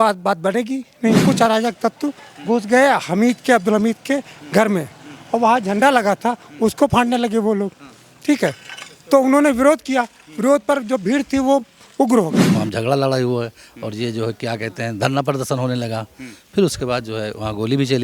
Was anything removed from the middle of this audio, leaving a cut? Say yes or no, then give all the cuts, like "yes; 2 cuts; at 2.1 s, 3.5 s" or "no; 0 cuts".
yes; 2 cuts; at 1.2 s, 12.4 s